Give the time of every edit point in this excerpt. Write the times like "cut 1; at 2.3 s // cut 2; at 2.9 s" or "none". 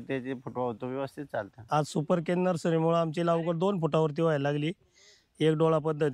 cut 1; at 1.6 s